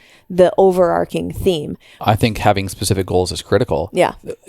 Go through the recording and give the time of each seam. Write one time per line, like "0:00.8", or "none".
0:02.0